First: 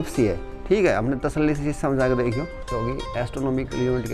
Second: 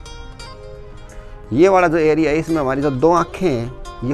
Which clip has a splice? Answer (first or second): first